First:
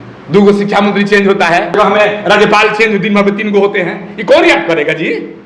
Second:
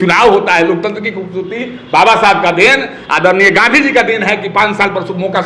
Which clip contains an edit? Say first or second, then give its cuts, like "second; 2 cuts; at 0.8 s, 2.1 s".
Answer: first; 1 cut; at 1.8 s